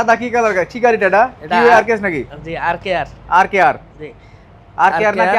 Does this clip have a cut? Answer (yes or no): no